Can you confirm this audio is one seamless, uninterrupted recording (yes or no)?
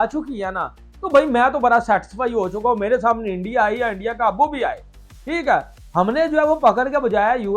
yes